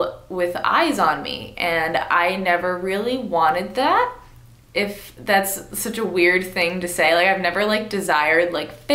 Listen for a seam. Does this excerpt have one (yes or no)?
no